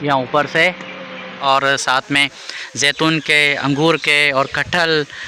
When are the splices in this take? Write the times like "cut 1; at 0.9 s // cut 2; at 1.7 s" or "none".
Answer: cut 1; at 1.4 s